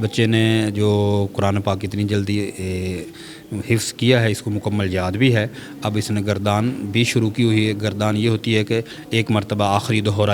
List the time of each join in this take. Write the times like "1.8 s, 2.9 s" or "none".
none